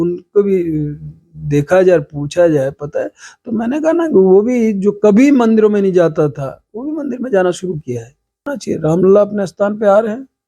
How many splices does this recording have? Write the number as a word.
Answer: one